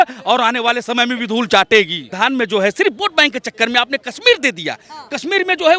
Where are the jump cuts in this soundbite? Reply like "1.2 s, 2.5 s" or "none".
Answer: 2.1 s